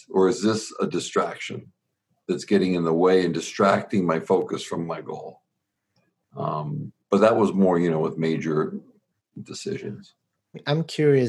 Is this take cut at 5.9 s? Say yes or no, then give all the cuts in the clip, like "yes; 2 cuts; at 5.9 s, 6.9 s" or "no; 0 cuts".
no; 0 cuts